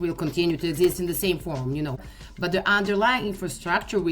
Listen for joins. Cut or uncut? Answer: cut